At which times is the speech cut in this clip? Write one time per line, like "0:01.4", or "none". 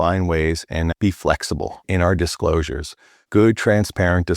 0:00.9

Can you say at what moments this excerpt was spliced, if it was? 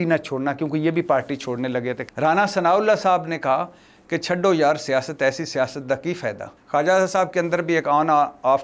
0:02.0
0:06.5

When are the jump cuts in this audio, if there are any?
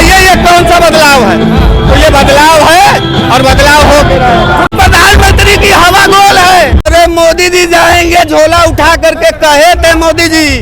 0:04.7
0:06.9

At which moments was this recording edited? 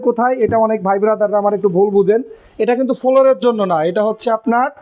none

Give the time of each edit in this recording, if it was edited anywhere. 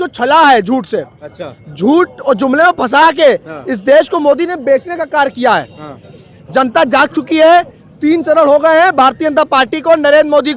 none

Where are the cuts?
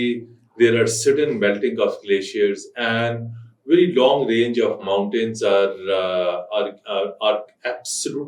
none

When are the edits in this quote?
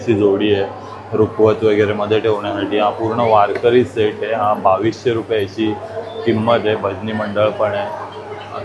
none

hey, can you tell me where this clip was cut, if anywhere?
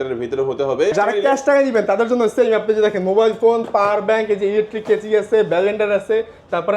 0:00.9

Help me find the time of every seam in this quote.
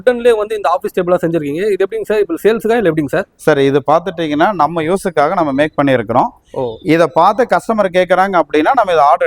none

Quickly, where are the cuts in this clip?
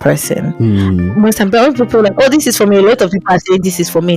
0:00.8
0:02.2

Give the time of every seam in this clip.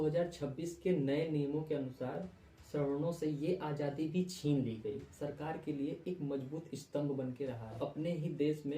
0:05.0
0:07.8

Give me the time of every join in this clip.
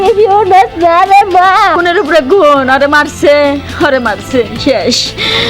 0:01.8

